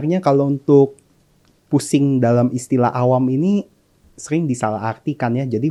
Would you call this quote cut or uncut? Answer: uncut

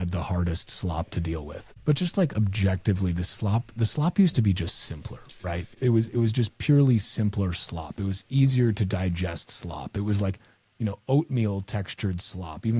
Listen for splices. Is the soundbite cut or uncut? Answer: cut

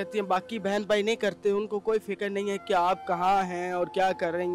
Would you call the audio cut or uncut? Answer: uncut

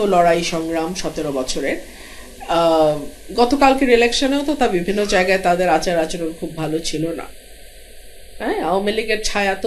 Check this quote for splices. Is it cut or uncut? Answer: uncut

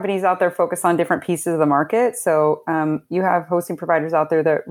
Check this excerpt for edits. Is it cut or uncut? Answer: uncut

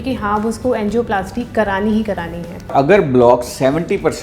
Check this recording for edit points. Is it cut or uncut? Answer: cut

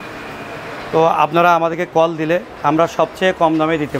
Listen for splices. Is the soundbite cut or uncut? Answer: uncut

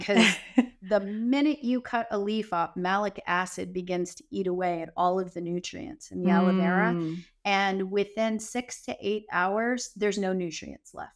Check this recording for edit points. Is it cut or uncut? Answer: uncut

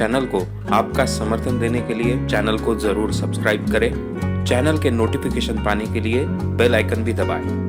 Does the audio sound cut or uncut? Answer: uncut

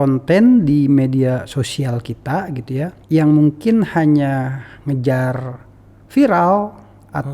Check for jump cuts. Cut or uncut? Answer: cut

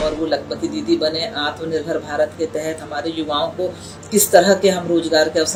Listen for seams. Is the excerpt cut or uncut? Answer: uncut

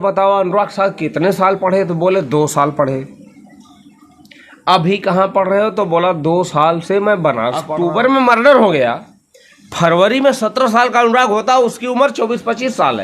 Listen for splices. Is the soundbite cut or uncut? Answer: cut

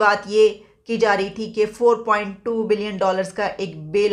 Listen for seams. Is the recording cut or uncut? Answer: uncut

